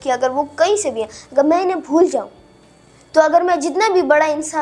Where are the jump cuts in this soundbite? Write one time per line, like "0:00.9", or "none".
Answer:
none